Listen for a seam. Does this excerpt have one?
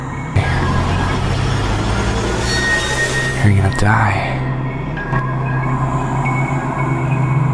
no; 0 cuts

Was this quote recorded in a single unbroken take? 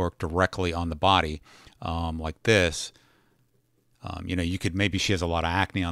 yes; 0 cuts

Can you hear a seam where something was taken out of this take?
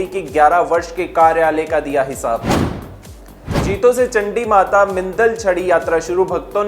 yes; 1 cut; at 3.5 s

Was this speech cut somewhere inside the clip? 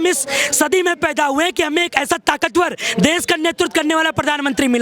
no; 0 cuts

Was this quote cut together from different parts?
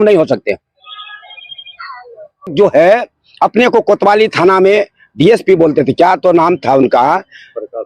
yes; 1 cut; at 2.5 s

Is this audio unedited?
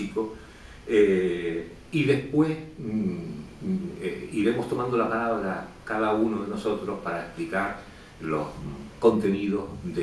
yes; 0 cuts

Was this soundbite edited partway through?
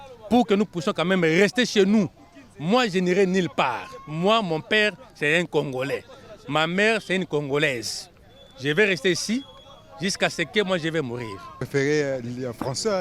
no; 0 cuts

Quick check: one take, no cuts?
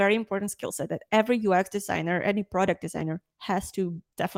yes; 0 cuts

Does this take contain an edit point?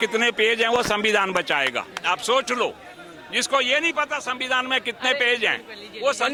no; 0 cuts

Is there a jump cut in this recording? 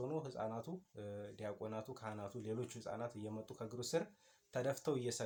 no; 0 cuts

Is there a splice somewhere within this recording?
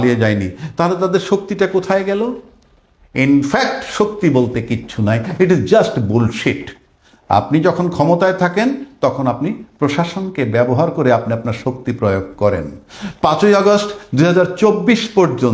no; 0 cuts

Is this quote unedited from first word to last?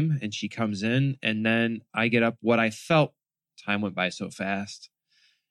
yes; 0 cuts

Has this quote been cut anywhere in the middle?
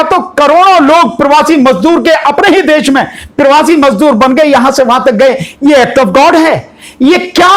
no; 0 cuts

